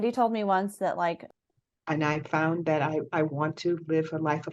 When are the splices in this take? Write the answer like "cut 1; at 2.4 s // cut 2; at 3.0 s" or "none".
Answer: cut 1; at 1.2 s